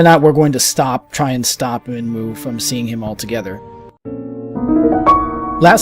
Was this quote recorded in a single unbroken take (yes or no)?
no